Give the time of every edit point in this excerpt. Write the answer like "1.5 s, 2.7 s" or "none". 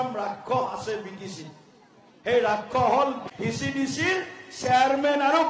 3.3 s

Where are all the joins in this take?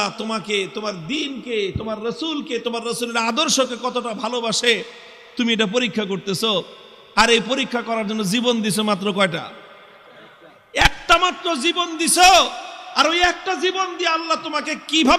none

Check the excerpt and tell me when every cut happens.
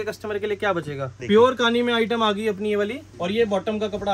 1.2 s, 3.1 s

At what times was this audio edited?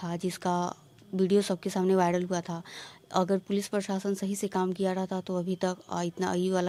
none

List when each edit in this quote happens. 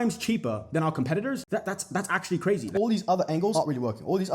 1.4 s, 2.6 s

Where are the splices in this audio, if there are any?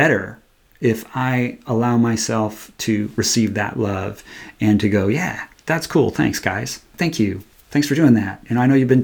none

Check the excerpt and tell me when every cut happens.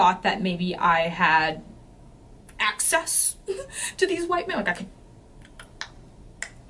none

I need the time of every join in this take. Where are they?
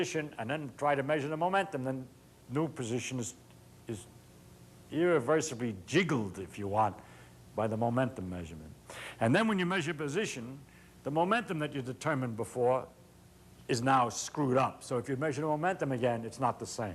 2.6 s

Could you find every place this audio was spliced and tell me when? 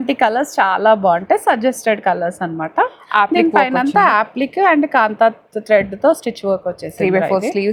none

